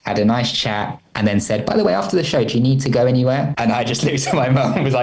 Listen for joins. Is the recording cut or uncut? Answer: cut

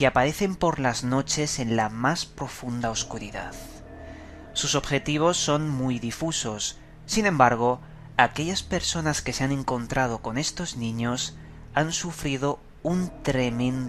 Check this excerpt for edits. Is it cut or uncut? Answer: cut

